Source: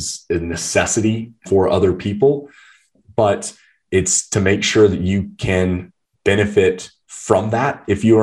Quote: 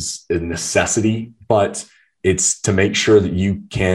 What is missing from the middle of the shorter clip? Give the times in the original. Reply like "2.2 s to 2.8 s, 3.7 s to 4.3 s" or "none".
1.3 s to 3.0 s